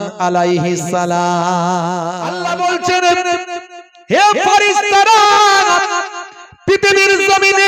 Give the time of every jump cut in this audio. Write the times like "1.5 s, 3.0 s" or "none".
2.4 s